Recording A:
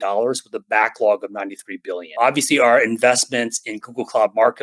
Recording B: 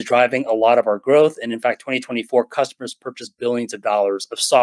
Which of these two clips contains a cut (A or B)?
A